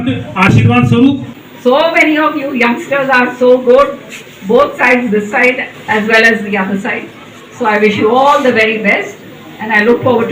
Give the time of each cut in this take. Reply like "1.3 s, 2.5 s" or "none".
1.3 s